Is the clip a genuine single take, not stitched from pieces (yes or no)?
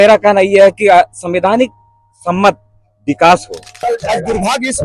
no